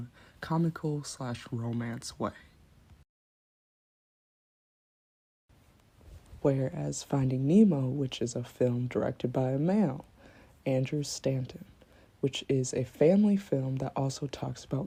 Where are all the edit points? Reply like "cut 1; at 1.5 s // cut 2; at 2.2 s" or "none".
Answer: none